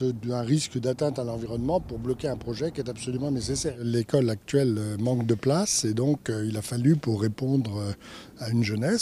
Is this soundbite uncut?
no; 1 cut; at 0.9 s

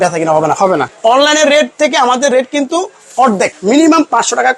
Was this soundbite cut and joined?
yes; 2 cuts; at 0.9 s, 3.6 s

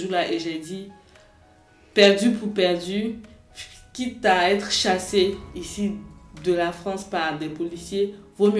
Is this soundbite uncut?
yes; 0 cuts

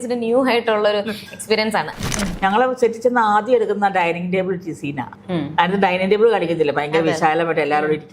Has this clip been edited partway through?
yes; 2 cuts; at 2.0 s, 5.1 s

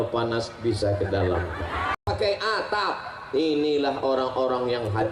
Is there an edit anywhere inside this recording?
yes; 1 cut; at 2.0 s

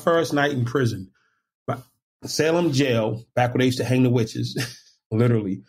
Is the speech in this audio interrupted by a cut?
no; 0 cuts

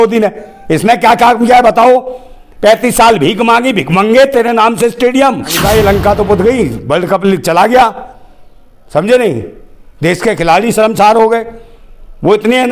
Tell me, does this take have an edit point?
yes; 1 cut; at 5.6 s

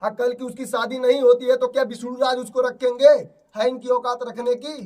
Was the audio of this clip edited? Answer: no; 0 cuts

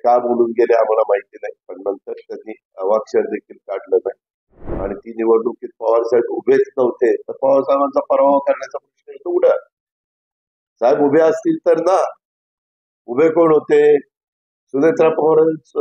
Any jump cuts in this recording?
no; 0 cuts

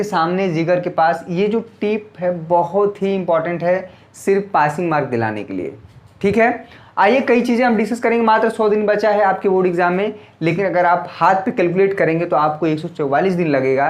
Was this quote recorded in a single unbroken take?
yes; 0 cuts

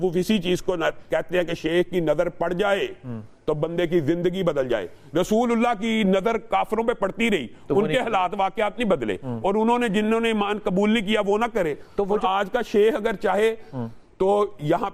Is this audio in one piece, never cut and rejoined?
yes; 0 cuts

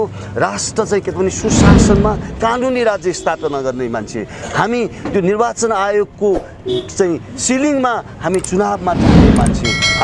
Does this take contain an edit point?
no; 0 cuts

